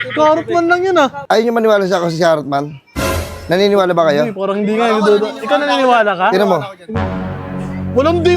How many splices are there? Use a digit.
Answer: 1